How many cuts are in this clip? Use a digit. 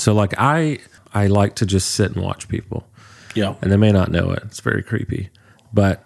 1